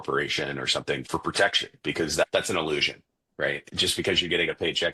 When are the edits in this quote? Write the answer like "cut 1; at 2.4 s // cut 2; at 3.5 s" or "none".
cut 1; at 1.0 s // cut 2; at 2.2 s // cut 3; at 3.6 s